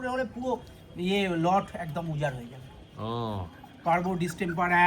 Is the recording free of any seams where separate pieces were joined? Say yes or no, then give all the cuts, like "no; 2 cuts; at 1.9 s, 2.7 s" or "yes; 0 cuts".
yes; 0 cuts